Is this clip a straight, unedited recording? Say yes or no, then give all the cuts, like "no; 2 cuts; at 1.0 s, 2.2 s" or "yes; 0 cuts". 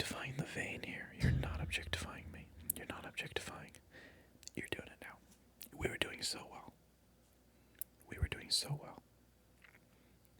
yes; 0 cuts